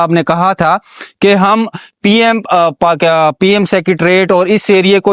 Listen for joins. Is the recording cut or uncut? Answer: uncut